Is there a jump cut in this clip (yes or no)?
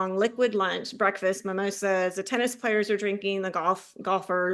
no